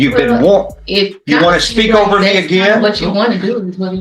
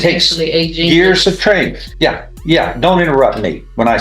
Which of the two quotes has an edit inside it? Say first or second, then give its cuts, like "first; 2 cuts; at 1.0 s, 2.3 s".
second; 1 cut; at 1.8 s